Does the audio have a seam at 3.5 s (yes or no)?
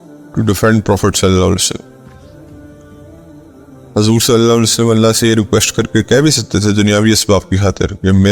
yes